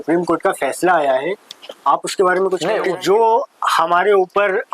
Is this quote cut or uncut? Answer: cut